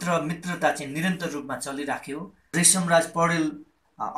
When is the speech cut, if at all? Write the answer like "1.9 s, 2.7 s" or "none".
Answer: 2.4 s